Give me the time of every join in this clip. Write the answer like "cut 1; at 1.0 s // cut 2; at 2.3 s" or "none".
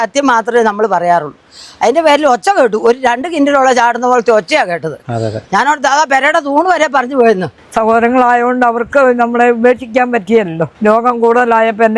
cut 1; at 7.6 s // cut 2; at 10.6 s